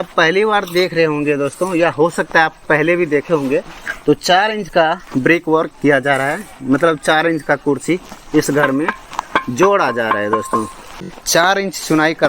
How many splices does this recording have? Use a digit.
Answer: 1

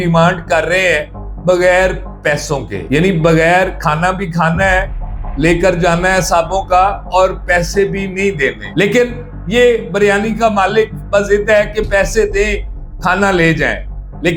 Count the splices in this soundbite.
0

